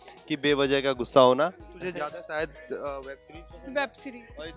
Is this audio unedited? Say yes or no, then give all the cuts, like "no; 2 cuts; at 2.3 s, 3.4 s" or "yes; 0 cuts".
no; 1 cut; at 1.7 s